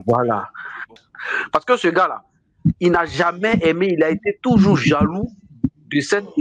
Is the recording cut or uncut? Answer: uncut